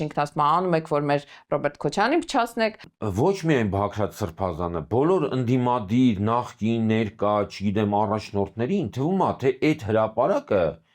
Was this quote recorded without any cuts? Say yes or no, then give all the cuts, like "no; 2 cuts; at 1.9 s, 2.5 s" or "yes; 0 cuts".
no; 1 cut; at 2.9 s